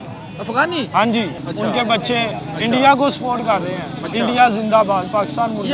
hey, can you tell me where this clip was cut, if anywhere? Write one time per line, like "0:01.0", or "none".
0:01.4